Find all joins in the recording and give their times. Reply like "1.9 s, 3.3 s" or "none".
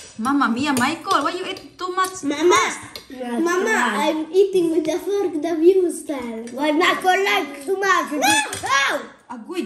none